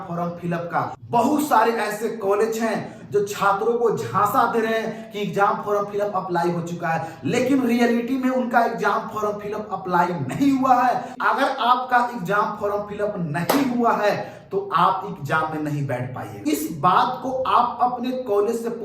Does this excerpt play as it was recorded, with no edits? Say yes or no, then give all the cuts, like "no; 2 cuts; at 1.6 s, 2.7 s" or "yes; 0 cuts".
no; 3 cuts; at 1.0 s, 11.1 s, 16.5 s